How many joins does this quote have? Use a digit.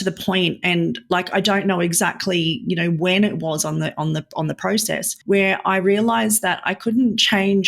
1